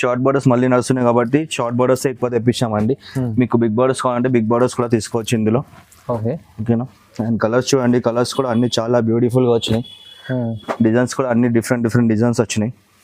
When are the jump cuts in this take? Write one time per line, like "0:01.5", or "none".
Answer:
none